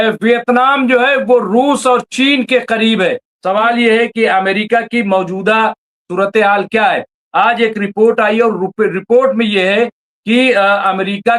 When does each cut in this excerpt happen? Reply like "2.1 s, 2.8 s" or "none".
3.3 s